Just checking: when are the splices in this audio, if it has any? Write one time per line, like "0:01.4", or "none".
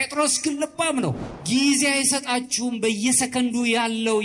0:01.3